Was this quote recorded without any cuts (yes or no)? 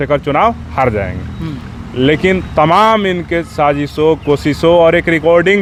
yes